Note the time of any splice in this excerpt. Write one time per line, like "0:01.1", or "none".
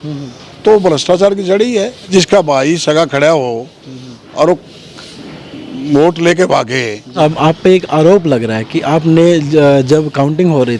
0:02.1
0:07.1